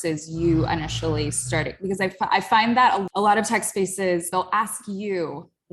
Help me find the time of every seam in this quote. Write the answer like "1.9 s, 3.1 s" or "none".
3.0 s, 4.3 s